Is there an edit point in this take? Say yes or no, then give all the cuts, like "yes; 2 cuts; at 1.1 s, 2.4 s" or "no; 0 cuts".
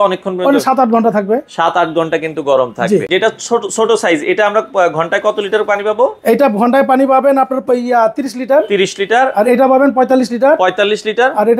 yes; 1 cut; at 3.1 s